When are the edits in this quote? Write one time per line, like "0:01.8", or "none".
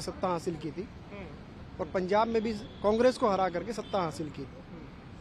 none